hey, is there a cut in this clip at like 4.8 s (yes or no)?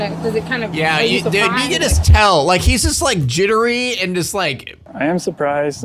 yes